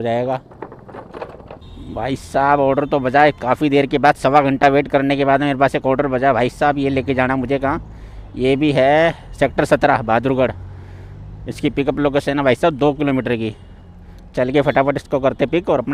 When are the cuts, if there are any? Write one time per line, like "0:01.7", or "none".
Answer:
none